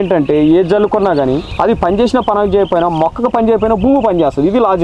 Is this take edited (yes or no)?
yes